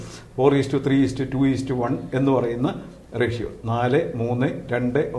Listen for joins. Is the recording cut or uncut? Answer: uncut